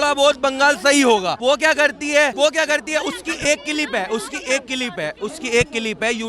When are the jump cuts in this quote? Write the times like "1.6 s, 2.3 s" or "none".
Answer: 1.4 s, 2.3 s